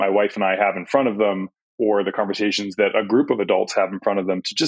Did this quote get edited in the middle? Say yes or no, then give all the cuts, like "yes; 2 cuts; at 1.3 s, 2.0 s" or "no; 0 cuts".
yes; 1 cut; at 1.6 s